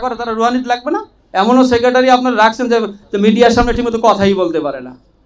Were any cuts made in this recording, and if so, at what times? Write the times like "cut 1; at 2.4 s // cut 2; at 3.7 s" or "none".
cut 1; at 1.2 s